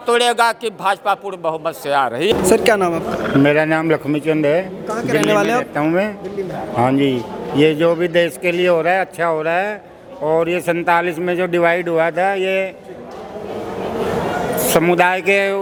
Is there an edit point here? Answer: no; 0 cuts

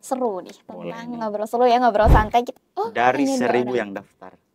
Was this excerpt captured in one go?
no; 1 cut; at 2.5 s

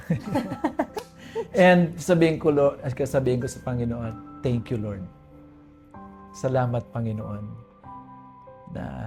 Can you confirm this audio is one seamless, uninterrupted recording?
yes; 0 cuts

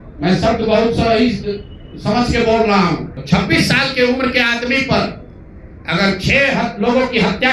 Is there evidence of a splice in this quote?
yes; 1 cut; at 3.1 s

